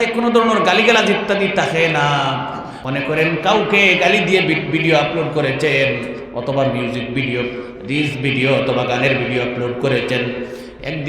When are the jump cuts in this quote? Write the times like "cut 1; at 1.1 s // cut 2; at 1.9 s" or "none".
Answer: cut 1; at 2.7 s // cut 2; at 4.0 s